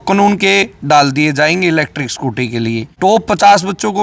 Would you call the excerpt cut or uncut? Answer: cut